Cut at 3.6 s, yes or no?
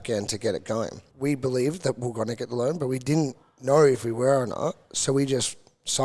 no